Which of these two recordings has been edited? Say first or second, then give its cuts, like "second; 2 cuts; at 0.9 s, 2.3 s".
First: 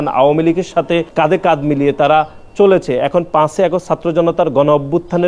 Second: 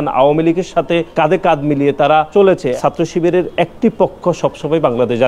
second; 1 cut; at 2.4 s